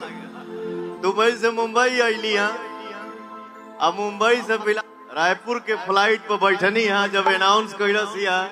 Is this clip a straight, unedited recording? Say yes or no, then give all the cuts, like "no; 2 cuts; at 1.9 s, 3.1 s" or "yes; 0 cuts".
no; 2 cuts; at 0.9 s, 4.8 s